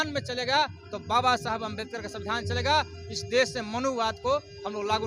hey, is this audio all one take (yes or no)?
yes